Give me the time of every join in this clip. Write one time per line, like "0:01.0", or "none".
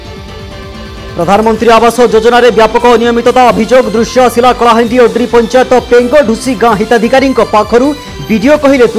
0:00.9